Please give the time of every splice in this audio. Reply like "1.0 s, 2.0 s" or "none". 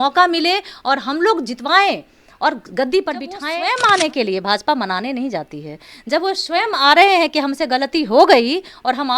3.4 s